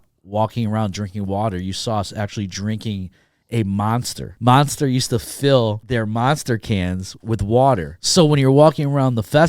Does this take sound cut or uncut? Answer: cut